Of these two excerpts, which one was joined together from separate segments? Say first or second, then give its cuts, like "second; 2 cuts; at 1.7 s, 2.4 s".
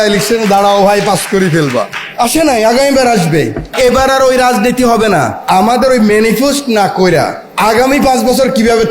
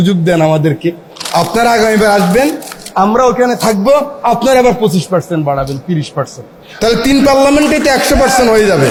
first; 4 cuts; at 2.0 s, 3.7 s, 5.4 s, 7.4 s